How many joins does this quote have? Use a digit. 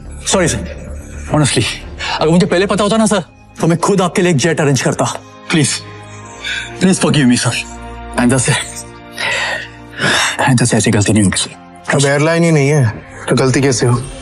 0